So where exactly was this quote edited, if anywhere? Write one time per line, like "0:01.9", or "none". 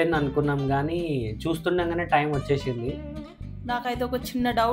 0:03.0